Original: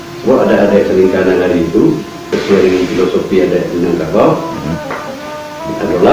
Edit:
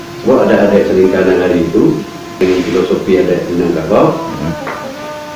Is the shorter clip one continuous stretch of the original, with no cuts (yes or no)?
no